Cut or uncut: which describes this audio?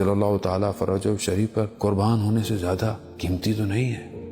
cut